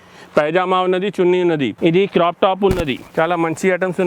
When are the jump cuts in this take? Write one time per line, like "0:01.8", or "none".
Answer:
0:01.7
0:03.0